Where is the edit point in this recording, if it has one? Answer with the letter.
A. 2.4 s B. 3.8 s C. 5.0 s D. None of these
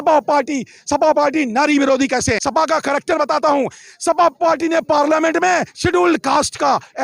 A